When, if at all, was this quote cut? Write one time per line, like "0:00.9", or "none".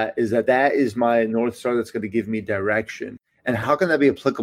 none